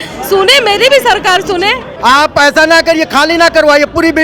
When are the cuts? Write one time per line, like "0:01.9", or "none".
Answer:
0:01.9